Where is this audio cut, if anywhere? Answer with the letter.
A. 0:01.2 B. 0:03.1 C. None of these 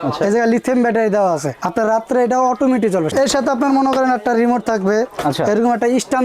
B